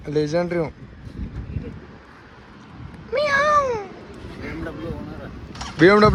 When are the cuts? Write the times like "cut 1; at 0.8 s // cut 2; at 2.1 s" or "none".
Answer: none